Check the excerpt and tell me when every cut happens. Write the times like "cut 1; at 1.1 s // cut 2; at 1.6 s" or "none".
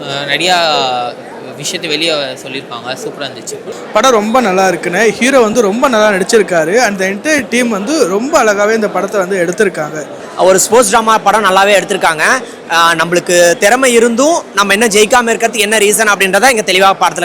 cut 1; at 3.7 s // cut 2; at 10.3 s